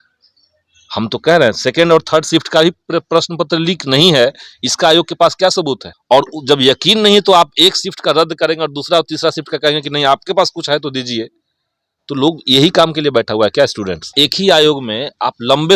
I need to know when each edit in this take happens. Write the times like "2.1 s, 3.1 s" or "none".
5.9 s, 14.1 s

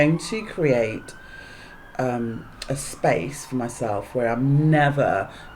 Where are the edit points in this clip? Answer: none

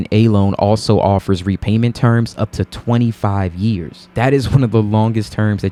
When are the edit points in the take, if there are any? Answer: none

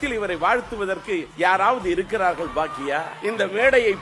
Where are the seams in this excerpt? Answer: 1.3 s, 3.1 s

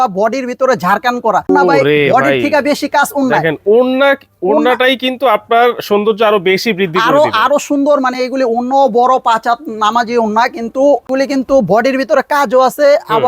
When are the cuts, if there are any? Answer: 1.5 s, 11.1 s

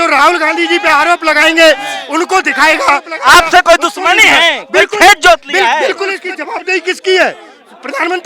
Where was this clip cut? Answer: 3.1 s, 6.3 s

